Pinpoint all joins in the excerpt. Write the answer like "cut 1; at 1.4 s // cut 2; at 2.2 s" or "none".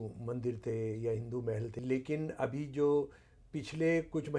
cut 1; at 1.7 s

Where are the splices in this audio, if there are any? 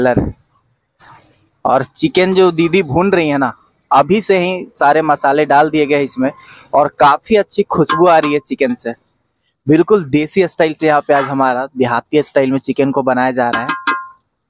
none

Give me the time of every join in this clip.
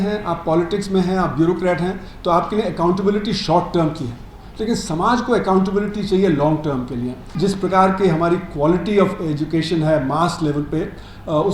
cut 1; at 7.2 s

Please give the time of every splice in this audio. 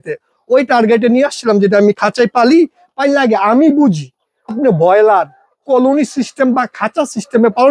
cut 1; at 4.6 s

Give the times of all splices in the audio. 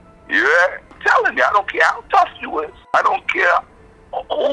cut 1; at 1.0 s // cut 2; at 2.9 s

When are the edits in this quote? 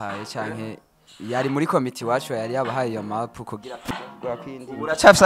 cut 1; at 3.8 s

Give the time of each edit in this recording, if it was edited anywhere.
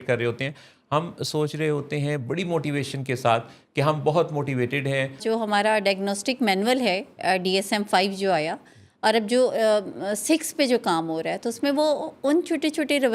cut 1; at 5.2 s

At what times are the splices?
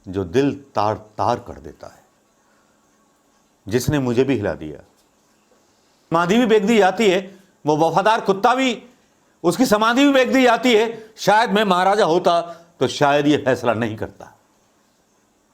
cut 1; at 6.1 s

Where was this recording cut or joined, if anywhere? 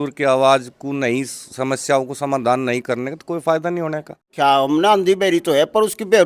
cut 1; at 4.3 s

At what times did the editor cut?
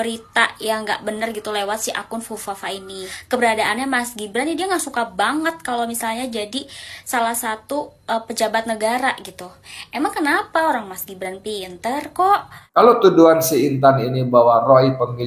cut 1; at 3.1 s // cut 2; at 12.6 s

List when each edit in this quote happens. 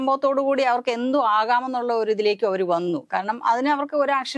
none

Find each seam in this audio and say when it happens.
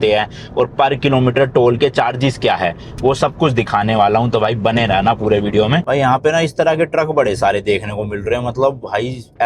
cut 1; at 5.8 s

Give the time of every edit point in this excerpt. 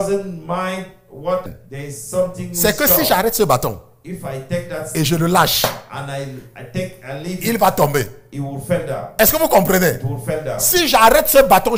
cut 1; at 1.5 s

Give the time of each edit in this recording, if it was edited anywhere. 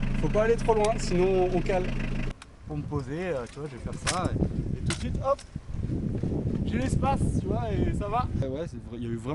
cut 1; at 2.3 s // cut 2; at 8.4 s

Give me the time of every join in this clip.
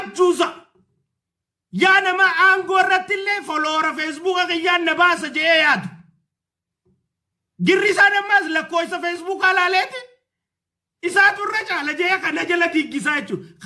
none

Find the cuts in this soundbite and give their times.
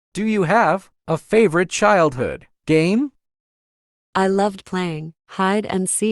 cut 1; at 0.9 s

